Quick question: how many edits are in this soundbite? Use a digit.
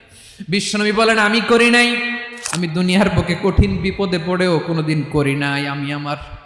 1